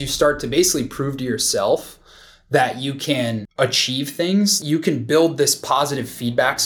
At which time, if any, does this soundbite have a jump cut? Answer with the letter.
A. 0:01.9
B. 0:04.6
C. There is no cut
B